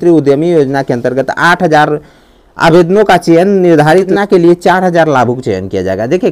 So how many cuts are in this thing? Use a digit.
1